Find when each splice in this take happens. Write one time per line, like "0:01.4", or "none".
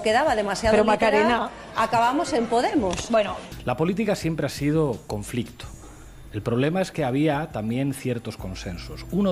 0:03.5